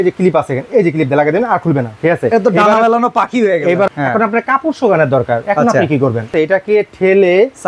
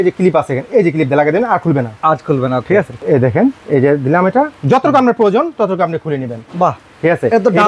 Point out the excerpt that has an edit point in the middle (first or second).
first